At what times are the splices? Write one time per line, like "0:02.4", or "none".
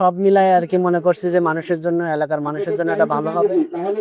none

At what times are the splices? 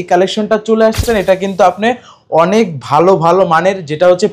0:01.0

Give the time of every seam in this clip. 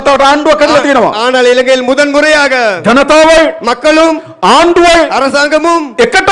none

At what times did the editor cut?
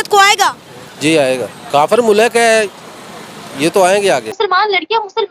0:01.5
0:04.3

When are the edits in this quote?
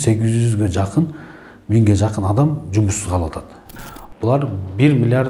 0:03.6

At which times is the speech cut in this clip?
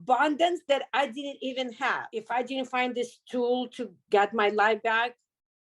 0:02.1

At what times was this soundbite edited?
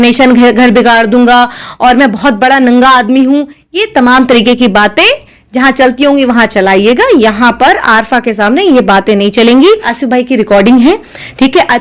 0:09.9

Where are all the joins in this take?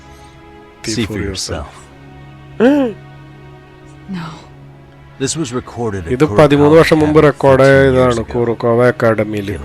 none

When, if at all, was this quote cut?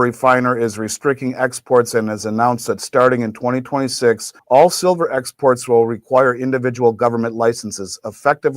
0:04.3

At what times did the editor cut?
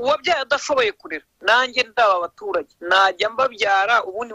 0:02.8

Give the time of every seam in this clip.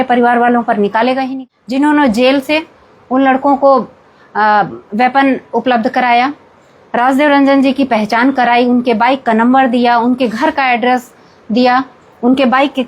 0:01.2

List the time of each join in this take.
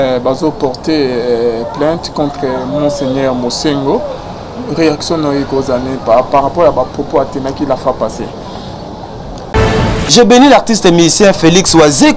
0:09.5

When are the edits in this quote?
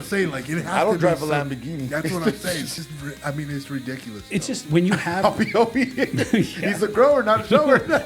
0:02.8

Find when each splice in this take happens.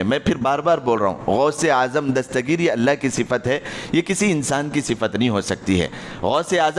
none

